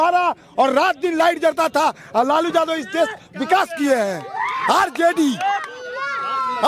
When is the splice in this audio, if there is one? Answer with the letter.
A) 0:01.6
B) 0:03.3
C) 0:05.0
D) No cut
D